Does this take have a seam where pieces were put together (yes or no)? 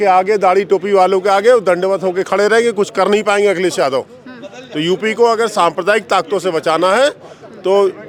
no